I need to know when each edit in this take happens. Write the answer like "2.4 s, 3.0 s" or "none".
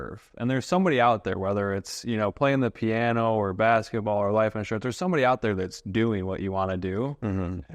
none